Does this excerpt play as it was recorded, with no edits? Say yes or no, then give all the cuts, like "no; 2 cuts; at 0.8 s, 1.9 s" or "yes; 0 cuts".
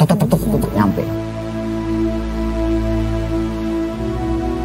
no; 1 cut; at 1.0 s